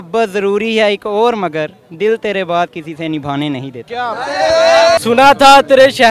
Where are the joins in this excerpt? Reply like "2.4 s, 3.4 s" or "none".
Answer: 5.0 s